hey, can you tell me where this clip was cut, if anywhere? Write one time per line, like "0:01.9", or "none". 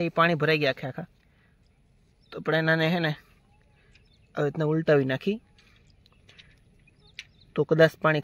none